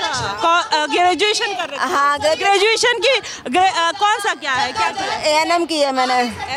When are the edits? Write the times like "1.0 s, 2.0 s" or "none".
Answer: none